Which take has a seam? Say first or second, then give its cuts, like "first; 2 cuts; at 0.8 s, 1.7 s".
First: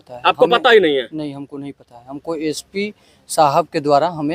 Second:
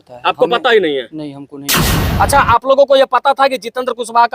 second; 1 cut; at 2.0 s